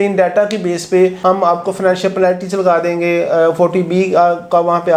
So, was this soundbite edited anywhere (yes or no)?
no